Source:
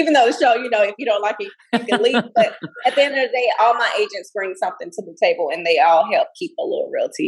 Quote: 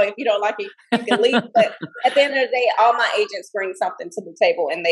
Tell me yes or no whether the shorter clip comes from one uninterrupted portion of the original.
yes